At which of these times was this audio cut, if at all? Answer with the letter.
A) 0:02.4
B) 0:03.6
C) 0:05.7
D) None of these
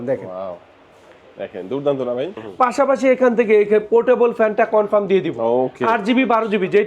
A